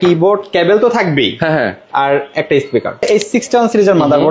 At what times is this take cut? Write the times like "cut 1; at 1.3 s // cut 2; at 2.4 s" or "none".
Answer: cut 1; at 3.1 s